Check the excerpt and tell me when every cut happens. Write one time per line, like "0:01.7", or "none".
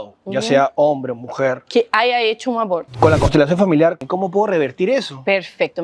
0:02.9
0:04.0